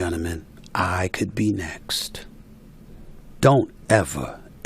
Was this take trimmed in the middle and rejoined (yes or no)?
yes